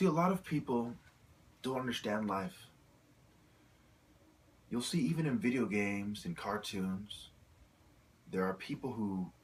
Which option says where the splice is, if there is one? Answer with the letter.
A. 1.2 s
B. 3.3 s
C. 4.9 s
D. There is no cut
D